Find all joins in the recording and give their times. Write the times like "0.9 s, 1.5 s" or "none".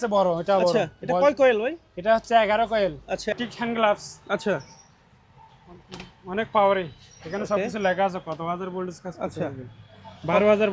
3.3 s